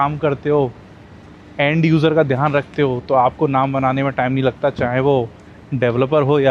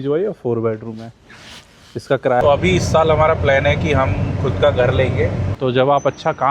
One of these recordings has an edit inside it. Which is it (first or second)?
second